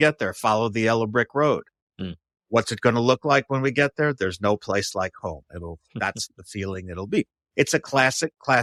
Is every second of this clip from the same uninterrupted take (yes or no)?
yes